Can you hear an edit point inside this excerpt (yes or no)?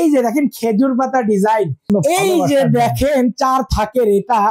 yes